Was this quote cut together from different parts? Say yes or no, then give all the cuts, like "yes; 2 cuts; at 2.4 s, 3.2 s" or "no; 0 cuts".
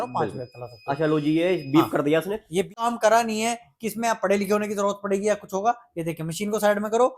yes; 1 cut; at 2.9 s